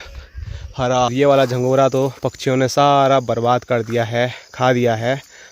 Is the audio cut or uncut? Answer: cut